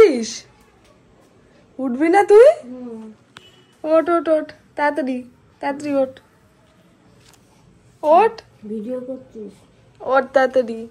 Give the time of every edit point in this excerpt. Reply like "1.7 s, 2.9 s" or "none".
none